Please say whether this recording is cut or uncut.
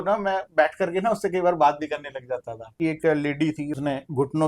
cut